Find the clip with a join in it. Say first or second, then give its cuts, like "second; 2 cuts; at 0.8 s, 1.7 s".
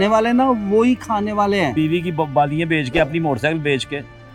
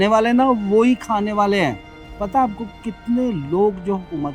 first; 1 cut; at 1.7 s